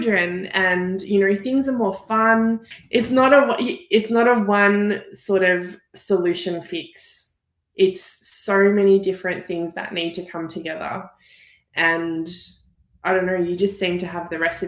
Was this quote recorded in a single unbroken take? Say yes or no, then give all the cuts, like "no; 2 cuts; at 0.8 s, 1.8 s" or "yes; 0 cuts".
no; 1 cut; at 2.7 s